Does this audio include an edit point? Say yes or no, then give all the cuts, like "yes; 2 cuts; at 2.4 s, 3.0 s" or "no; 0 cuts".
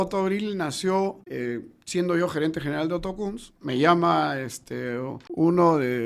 yes; 2 cuts; at 1.3 s, 5.2 s